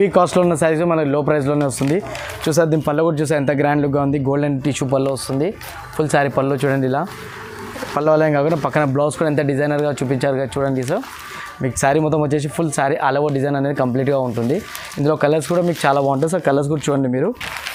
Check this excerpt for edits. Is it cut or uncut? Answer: uncut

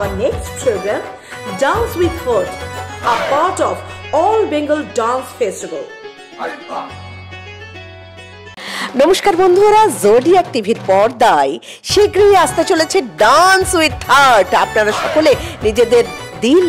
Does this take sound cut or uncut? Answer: cut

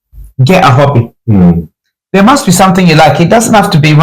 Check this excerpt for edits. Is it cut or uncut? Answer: uncut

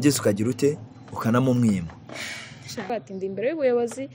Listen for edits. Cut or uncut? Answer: cut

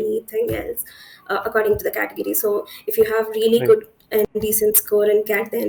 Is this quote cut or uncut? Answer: uncut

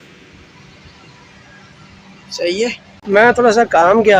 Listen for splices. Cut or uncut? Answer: cut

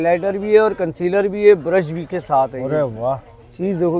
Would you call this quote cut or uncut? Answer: uncut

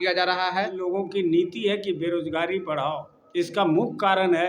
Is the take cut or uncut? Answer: cut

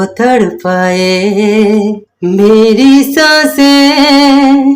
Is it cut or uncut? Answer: cut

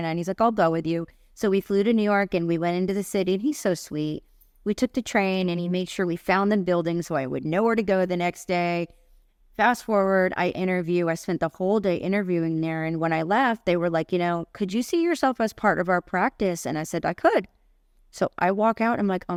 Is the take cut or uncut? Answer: uncut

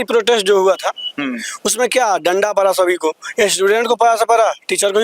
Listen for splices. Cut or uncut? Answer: uncut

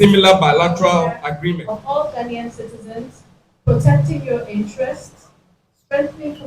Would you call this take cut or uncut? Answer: cut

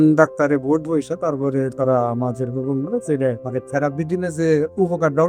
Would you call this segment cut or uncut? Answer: cut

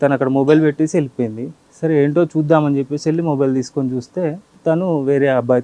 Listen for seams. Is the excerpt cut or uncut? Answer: uncut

